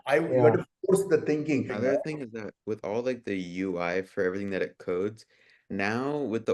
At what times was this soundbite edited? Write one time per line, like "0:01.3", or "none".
0:01.7